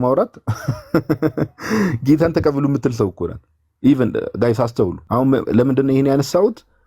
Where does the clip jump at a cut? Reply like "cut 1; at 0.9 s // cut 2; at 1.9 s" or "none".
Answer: cut 1; at 5.0 s